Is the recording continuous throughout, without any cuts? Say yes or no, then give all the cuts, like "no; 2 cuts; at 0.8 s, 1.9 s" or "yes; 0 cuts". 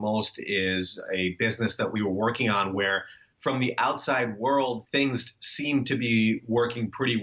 no; 1 cut; at 4.8 s